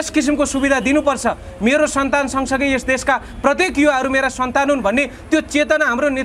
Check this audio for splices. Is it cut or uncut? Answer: uncut